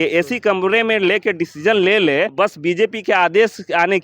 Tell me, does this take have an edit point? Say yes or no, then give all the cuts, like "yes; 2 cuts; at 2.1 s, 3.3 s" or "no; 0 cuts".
yes; 1 cut; at 2.3 s